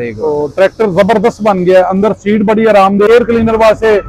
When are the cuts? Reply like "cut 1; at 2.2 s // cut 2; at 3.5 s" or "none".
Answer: cut 1; at 3.1 s